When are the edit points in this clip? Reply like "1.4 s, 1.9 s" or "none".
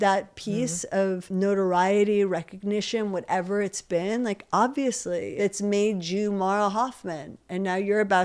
1.3 s, 5.3 s